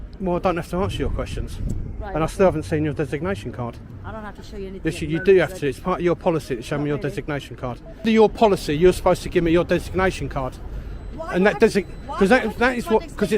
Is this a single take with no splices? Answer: no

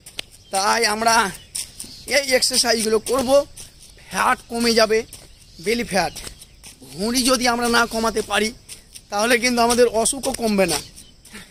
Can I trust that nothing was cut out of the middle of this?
yes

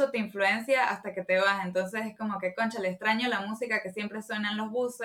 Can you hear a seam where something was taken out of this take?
no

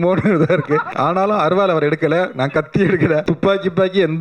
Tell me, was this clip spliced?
yes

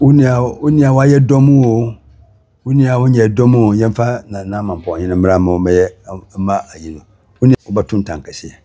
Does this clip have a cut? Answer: yes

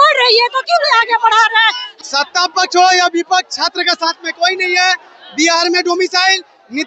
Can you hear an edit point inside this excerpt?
yes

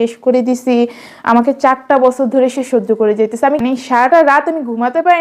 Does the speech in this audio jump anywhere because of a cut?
yes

